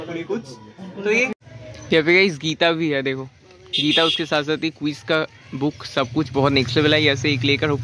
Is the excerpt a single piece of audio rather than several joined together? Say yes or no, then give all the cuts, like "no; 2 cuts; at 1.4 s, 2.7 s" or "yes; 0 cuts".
no; 1 cut; at 1.3 s